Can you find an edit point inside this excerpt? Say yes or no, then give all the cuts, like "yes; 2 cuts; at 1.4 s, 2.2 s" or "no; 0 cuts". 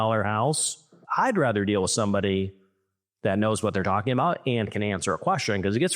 yes; 1 cut; at 1.0 s